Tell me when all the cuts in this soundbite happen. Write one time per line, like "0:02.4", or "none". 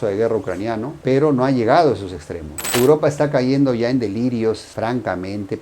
0:02.7